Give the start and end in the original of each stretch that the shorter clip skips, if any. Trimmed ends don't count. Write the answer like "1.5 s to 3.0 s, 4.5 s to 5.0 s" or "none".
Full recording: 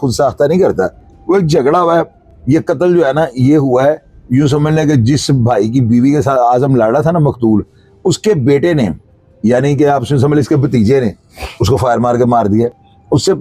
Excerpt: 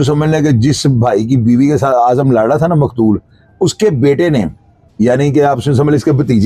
none